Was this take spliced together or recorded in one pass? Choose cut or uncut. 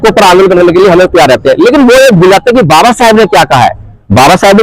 uncut